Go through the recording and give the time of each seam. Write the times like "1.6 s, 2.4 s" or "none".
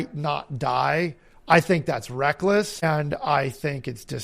2.8 s